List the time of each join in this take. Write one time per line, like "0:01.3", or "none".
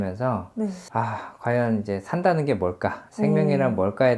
0:00.8
0:03.0